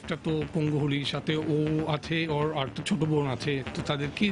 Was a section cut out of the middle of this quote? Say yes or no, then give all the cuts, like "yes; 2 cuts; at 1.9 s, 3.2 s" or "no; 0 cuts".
yes; 1 cut; at 2.3 s